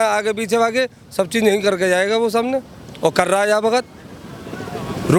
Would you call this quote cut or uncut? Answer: uncut